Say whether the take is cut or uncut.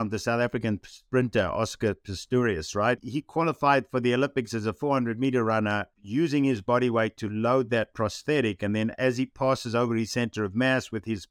cut